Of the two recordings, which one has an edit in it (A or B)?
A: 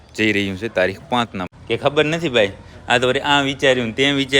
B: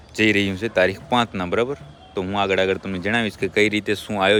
A